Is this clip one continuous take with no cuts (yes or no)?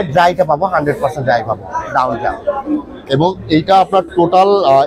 yes